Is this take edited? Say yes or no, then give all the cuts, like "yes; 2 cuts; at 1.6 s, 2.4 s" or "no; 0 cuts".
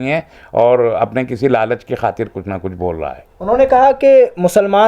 no; 0 cuts